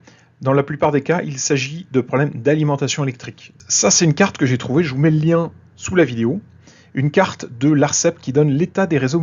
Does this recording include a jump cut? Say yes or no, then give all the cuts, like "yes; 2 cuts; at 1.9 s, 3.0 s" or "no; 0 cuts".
yes; 1 cut; at 3.6 s